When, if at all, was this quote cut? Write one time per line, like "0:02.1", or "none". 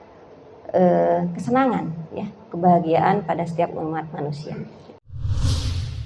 0:05.1